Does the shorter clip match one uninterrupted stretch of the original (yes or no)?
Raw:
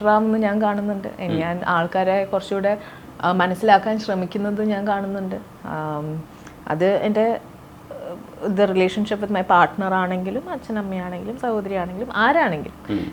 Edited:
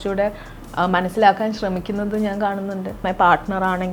no